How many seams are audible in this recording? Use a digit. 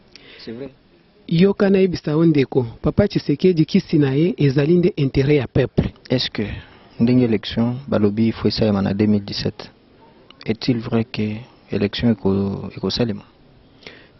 1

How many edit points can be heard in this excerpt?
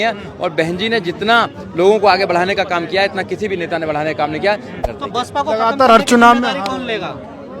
1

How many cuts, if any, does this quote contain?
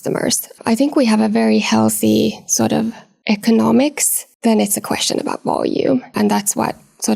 1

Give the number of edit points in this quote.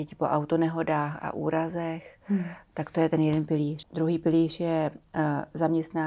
1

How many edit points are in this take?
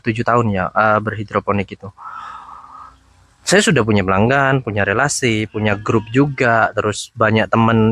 0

